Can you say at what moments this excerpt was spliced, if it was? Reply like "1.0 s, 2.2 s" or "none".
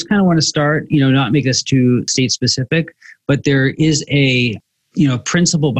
2.1 s